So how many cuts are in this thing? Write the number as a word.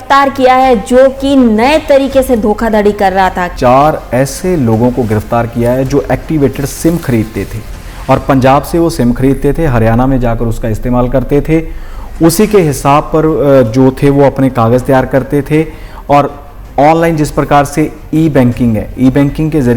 one